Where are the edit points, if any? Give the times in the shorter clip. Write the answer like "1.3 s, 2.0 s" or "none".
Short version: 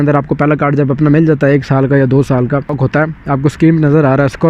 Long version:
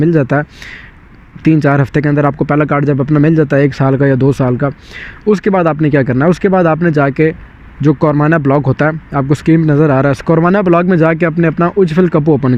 2.8 s